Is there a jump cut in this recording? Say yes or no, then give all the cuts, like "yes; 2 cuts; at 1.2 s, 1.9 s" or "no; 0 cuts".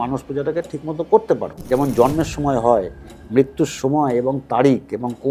yes; 1 cut; at 1.6 s